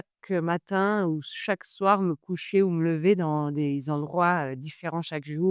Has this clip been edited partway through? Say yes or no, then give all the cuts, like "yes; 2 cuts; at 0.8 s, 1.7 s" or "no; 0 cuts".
no; 0 cuts